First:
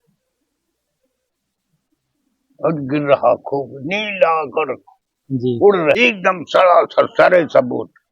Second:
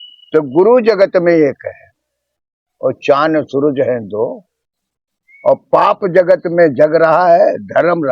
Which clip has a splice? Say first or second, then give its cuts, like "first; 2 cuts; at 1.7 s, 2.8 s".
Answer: first; 1 cut; at 6.0 s